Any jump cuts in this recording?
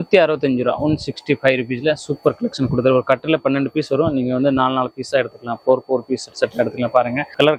no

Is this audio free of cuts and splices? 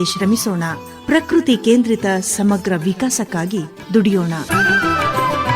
no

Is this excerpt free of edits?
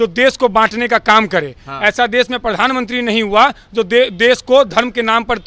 yes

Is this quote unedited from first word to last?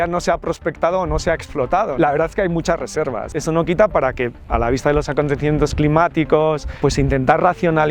no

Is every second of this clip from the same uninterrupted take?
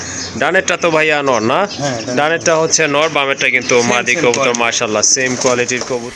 yes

